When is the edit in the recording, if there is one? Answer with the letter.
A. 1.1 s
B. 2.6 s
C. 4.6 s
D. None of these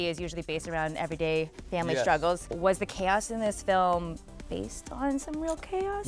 B